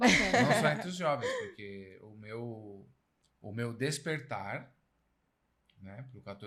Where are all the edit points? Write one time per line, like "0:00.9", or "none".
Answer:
none